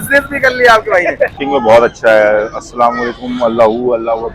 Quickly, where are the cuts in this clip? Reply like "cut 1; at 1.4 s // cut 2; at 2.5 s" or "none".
cut 1; at 1.4 s